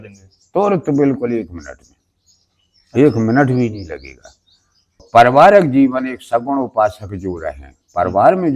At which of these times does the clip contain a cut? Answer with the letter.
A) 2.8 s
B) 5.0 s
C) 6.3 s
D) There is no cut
B